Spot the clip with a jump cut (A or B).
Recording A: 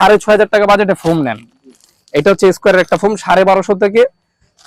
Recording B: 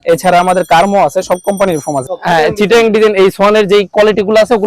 B